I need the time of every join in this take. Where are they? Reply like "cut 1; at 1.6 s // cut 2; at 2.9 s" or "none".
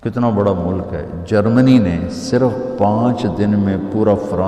none